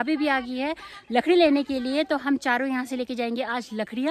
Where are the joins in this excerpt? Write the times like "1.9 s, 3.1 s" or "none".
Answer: none